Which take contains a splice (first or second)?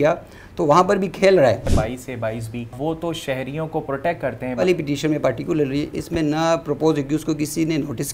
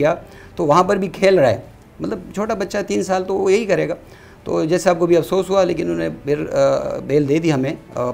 first